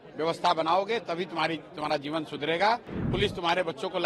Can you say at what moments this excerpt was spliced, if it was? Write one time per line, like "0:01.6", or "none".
0:03.0